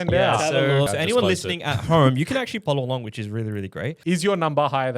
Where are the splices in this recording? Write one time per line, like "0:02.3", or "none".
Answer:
0:00.9
0:02.6
0:03.9